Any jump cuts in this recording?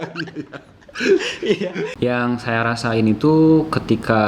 yes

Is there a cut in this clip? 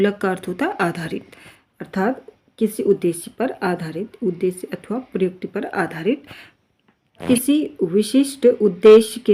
yes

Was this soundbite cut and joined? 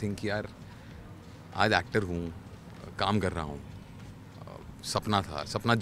no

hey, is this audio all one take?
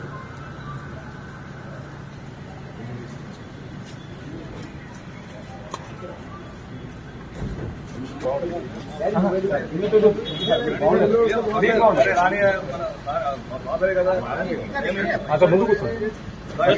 yes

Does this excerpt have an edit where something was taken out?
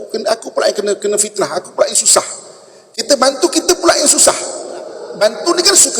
yes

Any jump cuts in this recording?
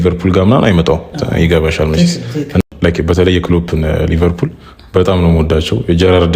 yes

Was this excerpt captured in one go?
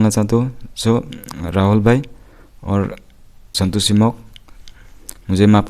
no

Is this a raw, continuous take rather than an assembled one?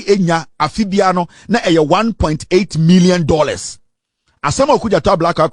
yes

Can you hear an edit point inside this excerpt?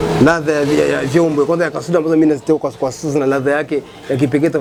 no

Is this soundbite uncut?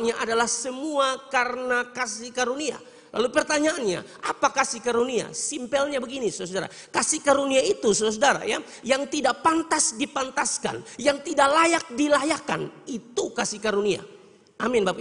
yes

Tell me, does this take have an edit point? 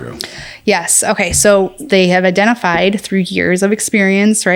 yes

